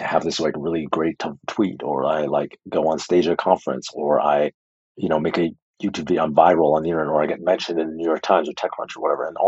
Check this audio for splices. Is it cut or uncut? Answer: uncut